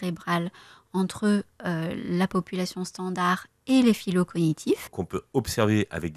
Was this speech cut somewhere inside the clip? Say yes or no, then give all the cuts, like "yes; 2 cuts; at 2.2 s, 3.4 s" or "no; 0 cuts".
yes; 1 cut; at 4.8 s